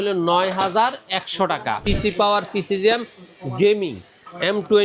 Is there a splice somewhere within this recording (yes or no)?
yes